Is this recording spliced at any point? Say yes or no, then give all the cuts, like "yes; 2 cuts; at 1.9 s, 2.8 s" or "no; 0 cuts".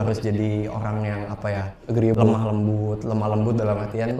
no; 0 cuts